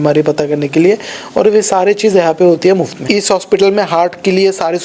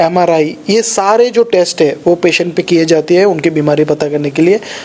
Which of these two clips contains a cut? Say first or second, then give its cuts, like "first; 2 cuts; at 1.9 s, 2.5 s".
first; 1 cut; at 3.0 s